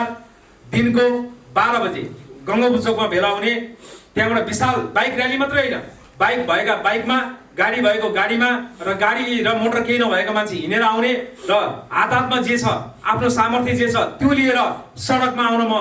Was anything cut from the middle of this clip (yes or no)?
no